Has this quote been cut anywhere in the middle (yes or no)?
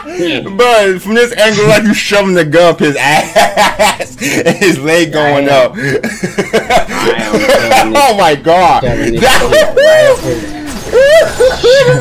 no